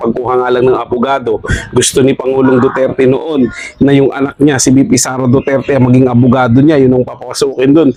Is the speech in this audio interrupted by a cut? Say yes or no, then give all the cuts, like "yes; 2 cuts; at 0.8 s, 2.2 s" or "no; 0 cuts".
no; 0 cuts